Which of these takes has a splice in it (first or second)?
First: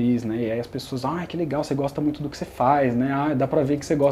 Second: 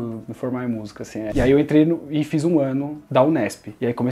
second